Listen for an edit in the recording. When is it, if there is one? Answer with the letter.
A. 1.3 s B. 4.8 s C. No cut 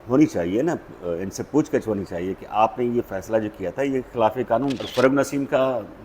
B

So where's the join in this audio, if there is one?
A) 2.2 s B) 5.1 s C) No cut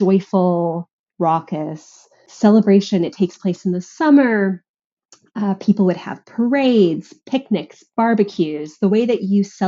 A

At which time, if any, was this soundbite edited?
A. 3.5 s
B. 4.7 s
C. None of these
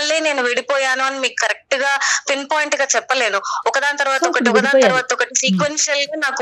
C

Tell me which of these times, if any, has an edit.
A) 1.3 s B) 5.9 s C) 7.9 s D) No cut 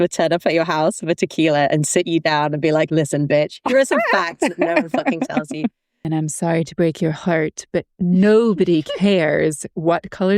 B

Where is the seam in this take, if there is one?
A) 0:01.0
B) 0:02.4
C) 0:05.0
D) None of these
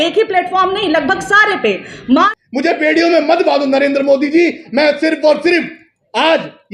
B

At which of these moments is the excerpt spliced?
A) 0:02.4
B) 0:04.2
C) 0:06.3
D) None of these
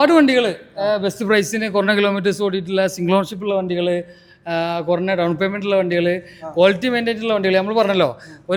D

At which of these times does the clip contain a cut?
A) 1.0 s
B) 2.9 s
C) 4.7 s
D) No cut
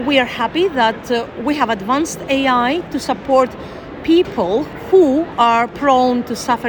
C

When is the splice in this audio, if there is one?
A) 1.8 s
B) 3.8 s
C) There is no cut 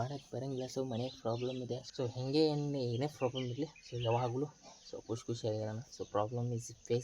A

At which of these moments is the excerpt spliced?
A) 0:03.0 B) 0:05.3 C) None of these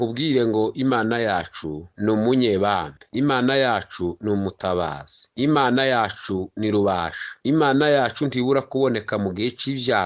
C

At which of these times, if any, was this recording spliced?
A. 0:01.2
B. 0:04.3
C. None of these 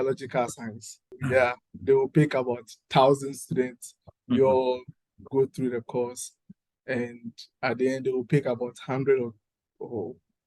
A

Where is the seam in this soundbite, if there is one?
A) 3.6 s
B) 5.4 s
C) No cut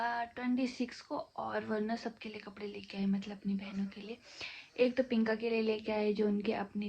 C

